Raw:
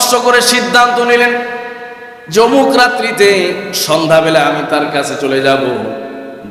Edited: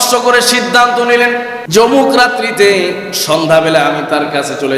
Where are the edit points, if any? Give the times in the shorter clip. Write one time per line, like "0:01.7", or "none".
0:01.6